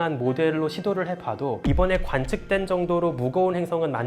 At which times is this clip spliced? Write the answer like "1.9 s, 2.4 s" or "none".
none